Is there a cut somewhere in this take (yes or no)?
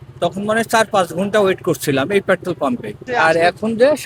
no